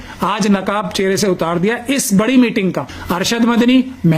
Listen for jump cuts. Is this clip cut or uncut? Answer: cut